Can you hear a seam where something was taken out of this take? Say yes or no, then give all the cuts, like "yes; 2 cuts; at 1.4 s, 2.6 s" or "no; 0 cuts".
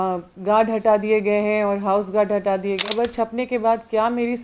yes; 1 cut; at 2.8 s